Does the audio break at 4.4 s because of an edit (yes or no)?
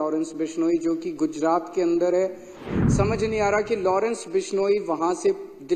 no